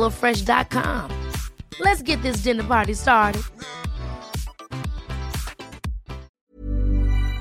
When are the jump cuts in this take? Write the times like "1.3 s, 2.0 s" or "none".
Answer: 6.4 s